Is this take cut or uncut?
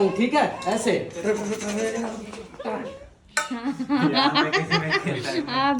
cut